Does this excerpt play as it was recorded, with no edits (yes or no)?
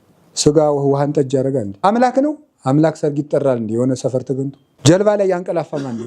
no